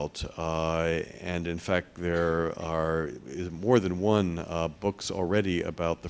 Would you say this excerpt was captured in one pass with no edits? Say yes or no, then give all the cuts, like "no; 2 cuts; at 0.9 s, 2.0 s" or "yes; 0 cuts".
no; 1 cut; at 1.5 s